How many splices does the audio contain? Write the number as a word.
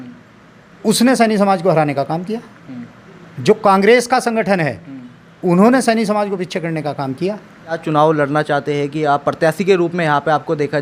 one